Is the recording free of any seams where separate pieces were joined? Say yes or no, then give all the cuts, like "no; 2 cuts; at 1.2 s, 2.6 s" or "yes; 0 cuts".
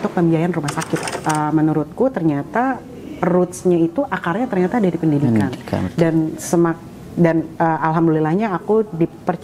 no; 1 cut; at 1.0 s